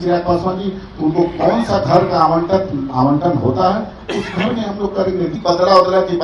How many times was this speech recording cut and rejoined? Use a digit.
1